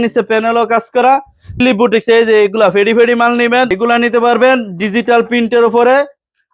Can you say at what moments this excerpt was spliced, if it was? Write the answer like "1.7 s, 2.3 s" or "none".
1.6 s, 3.7 s

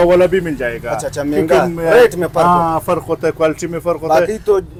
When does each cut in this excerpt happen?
none

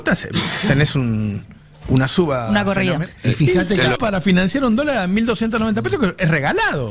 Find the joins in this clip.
4.0 s

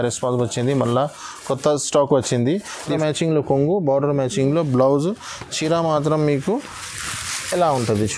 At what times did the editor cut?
2.9 s

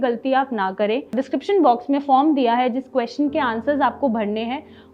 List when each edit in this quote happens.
1.2 s

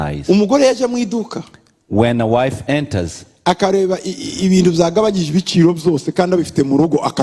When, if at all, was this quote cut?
none

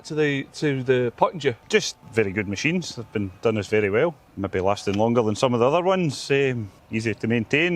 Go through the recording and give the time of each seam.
1.8 s, 4.2 s, 6.7 s

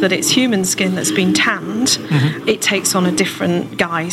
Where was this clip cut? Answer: 2.4 s

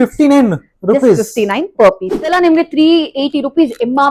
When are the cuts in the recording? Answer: 2.3 s

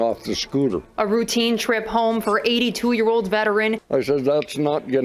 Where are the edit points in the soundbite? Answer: 3.8 s

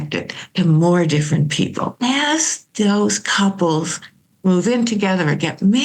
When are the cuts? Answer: 1.9 s

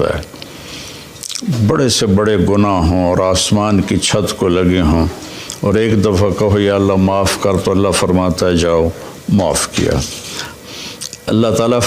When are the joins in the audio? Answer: 10.6 s

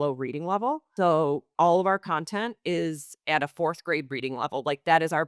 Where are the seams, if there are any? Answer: 1.5 s

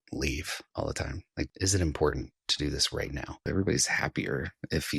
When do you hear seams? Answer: 1.0 s, 3.4 s

